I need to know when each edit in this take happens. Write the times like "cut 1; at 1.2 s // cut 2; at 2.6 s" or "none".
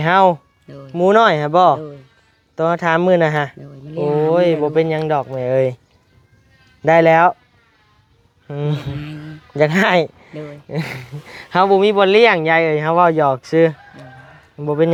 none